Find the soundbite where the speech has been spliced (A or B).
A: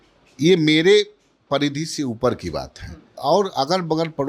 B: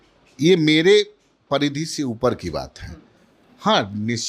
A